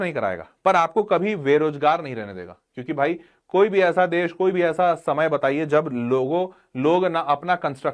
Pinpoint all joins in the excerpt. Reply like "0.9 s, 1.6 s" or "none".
none